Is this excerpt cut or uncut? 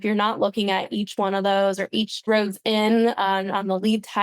cut